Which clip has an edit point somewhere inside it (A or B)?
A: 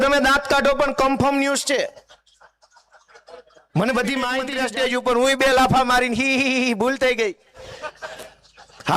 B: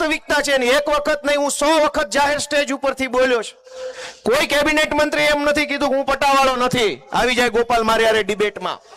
A